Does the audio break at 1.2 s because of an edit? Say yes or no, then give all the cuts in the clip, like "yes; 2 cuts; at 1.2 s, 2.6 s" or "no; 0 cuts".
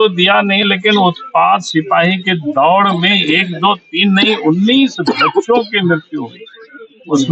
no; 0 cuts